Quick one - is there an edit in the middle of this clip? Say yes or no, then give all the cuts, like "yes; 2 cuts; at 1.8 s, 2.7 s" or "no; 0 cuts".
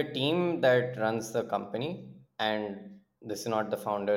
no; 0 cuts